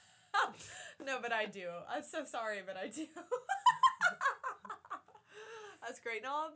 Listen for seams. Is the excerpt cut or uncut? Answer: uncut